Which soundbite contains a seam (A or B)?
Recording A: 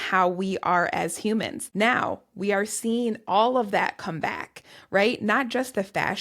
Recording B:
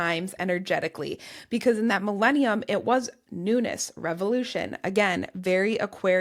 A